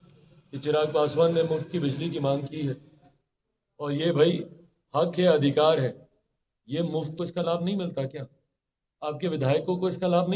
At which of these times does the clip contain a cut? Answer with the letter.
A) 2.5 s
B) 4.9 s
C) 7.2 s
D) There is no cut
C